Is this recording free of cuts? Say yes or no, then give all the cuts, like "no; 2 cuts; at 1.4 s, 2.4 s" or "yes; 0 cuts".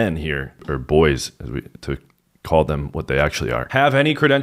yes; 0 cuts